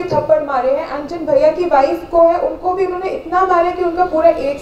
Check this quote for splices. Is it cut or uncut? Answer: uncut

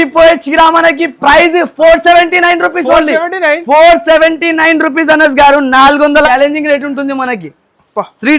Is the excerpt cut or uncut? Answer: cut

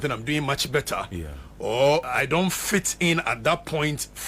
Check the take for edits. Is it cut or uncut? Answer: cut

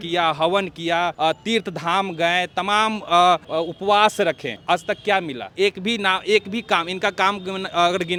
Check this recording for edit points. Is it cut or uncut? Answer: uncut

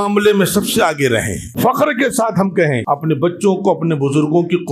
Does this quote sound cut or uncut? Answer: cut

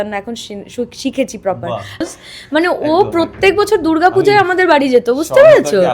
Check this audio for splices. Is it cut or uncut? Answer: cut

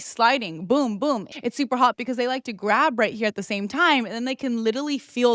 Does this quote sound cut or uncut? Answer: cut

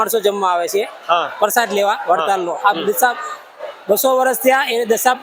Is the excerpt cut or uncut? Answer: uncut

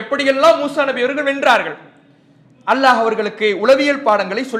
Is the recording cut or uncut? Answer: uncut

